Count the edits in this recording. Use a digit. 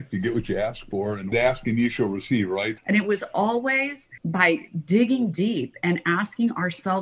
3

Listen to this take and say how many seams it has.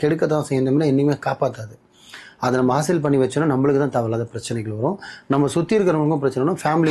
0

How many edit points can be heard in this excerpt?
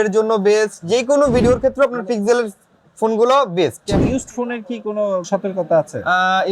2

